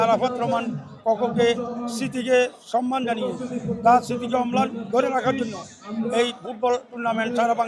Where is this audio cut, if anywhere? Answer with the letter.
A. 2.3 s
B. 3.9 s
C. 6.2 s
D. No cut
D